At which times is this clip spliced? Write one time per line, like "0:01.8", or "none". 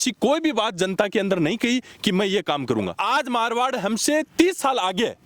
0:03.0